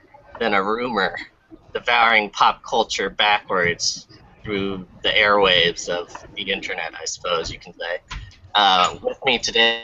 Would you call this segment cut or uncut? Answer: uncut